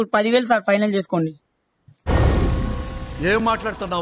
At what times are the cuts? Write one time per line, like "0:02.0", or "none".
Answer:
0:01.3